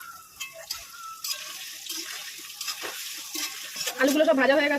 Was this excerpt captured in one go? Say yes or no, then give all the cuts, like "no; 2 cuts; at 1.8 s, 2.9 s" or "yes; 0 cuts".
no; 1 cut; at 3.8 s